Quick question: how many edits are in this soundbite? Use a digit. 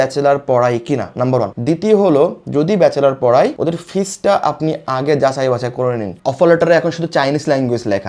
1